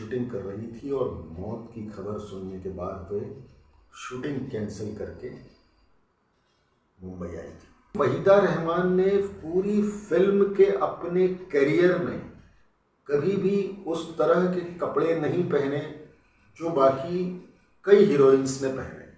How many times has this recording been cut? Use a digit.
1